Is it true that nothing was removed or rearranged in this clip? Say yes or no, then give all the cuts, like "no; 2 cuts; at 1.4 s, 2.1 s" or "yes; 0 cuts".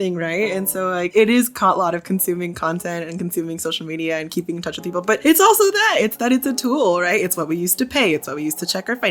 no; 2 cuts; at 1.1 s, 5.2 s